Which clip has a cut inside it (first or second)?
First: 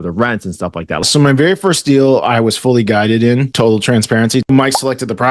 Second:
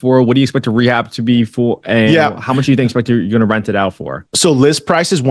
first